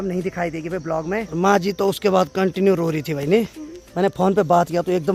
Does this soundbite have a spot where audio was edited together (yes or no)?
no